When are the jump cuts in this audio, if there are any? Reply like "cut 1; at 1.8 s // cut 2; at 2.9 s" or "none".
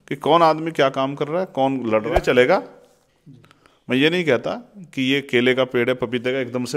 cut 1; at 2.2 s